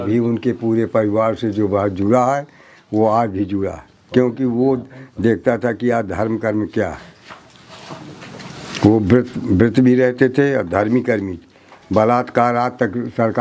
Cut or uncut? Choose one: uncut